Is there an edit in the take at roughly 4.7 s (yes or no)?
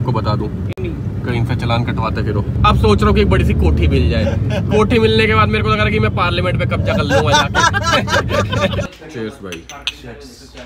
no